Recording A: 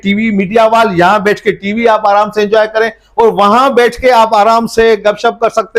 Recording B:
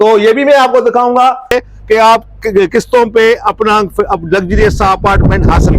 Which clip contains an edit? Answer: B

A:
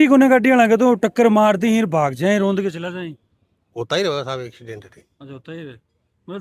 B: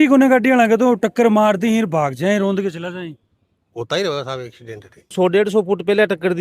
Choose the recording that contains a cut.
B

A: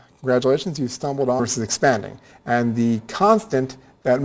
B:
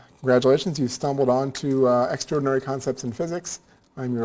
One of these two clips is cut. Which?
B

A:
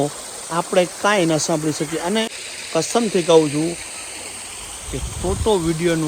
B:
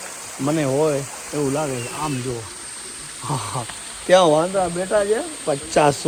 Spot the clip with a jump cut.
A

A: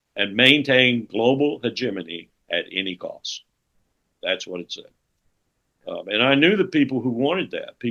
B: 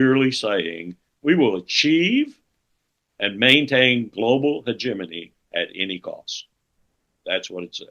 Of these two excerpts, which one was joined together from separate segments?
B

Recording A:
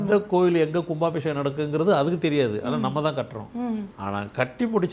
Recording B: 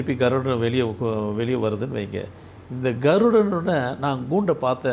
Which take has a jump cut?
A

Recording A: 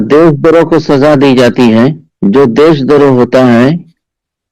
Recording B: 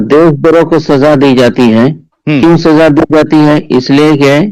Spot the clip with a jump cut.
A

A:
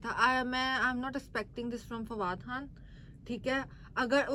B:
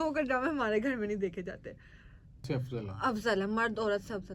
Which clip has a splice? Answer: B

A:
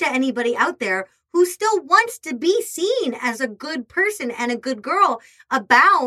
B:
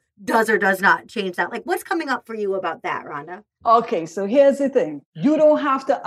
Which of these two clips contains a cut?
B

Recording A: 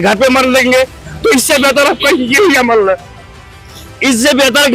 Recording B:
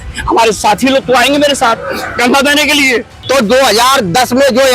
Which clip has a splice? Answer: B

